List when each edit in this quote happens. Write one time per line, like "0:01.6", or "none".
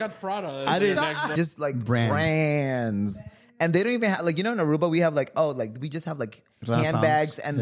0:01.3